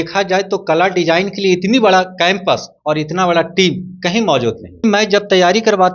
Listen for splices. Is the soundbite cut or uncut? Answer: cut